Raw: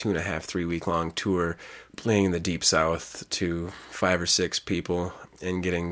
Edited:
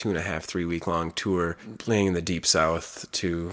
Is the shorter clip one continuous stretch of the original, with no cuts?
no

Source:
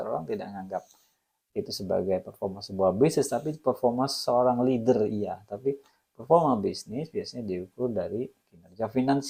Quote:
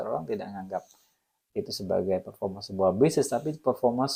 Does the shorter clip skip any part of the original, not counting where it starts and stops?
no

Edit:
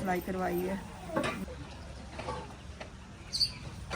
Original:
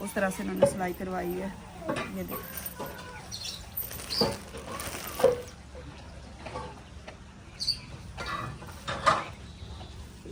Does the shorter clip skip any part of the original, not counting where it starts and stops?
yes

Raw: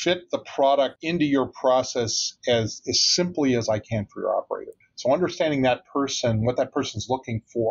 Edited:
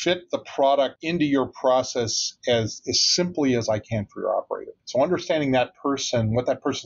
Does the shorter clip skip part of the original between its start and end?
yes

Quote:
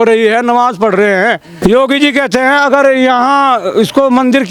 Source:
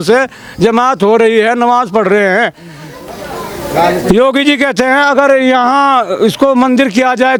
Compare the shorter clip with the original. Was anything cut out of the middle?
yes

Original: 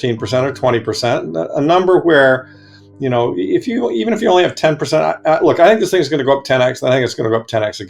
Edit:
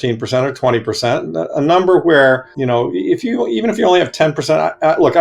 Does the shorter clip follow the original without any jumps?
no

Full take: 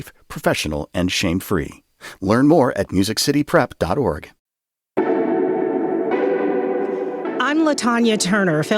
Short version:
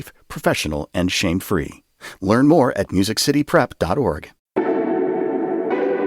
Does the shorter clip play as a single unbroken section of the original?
no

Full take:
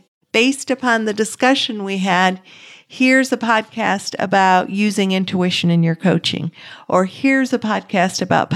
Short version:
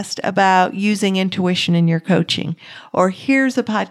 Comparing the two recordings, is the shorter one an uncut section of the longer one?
yes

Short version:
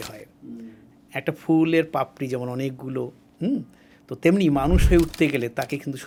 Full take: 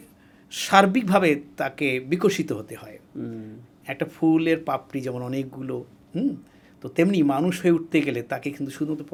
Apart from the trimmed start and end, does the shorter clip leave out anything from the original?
no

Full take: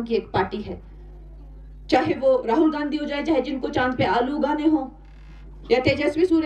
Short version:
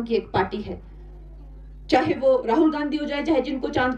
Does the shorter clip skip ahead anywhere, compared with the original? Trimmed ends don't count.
no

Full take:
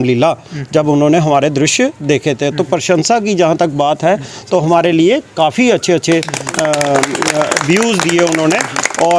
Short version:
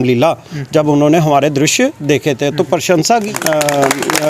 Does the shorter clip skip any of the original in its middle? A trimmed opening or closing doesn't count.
yes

